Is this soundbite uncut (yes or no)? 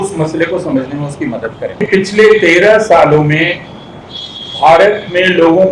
no